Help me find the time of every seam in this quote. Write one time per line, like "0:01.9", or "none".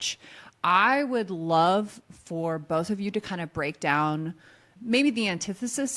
0:04.7